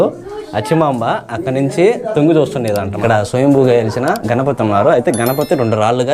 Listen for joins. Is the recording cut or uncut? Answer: cut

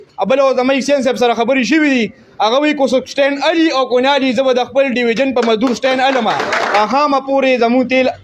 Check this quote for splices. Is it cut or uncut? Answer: cut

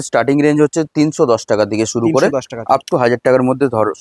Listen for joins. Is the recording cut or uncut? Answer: uncut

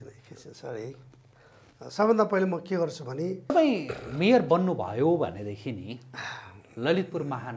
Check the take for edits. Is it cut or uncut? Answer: cut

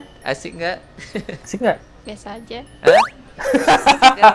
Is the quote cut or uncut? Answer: uncut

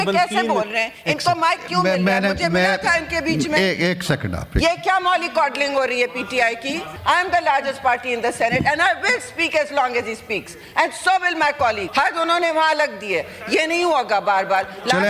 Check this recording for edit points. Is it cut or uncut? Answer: cut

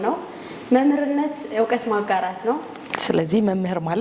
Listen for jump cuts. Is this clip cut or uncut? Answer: cut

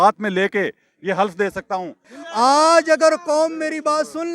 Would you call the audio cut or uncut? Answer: cut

